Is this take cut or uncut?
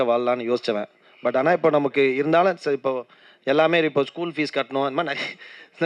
uncut